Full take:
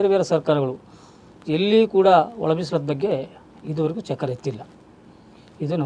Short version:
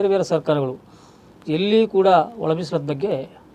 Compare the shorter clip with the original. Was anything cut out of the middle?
no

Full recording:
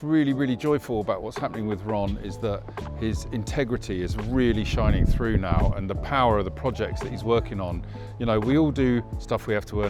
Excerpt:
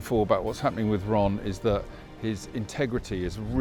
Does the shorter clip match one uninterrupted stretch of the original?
yes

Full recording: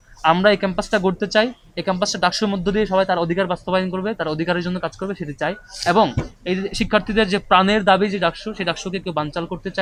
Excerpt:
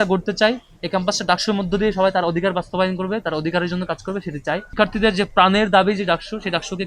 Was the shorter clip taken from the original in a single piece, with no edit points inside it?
no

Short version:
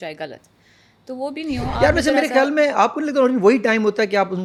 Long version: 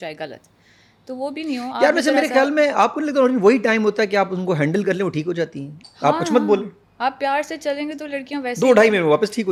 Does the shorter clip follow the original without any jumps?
yes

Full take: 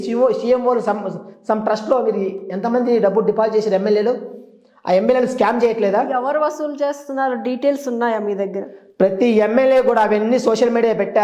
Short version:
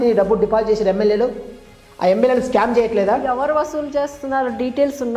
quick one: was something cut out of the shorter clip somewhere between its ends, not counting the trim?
no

